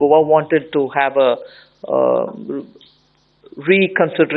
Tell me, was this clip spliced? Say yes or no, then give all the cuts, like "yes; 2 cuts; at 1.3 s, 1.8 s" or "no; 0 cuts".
no; 0 cuts